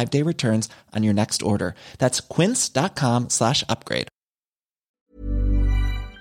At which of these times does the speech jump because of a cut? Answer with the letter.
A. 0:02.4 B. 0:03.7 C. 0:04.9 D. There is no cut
C